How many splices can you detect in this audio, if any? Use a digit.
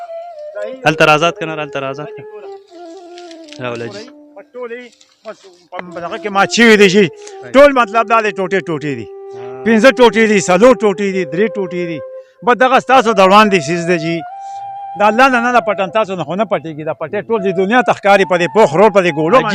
0